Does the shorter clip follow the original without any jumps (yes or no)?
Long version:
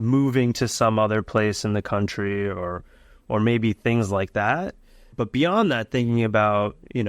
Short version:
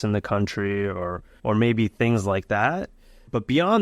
no